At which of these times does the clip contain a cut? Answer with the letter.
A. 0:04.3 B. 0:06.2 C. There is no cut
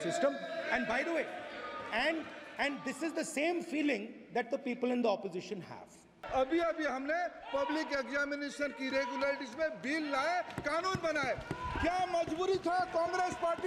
B